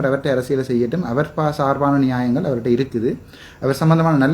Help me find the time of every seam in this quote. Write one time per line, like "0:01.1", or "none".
none